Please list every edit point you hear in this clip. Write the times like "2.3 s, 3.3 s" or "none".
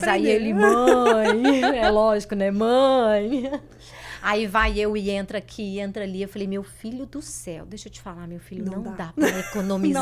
none